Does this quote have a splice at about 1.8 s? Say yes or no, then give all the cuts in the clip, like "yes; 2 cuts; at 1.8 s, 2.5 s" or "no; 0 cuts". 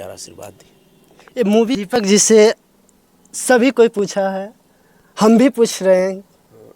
yes; 1 cut; at 1.8 s